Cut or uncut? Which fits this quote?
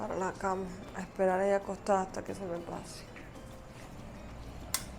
uncut